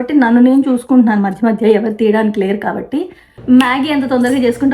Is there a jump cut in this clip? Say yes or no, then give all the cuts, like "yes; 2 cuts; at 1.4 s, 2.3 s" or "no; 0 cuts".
yes; 1 cut; at 3.3 s